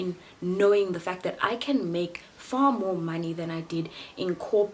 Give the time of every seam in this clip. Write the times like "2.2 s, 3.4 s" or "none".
none